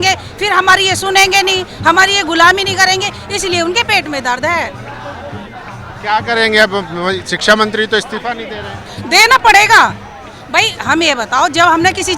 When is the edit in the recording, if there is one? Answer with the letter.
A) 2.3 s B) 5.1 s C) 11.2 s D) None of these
D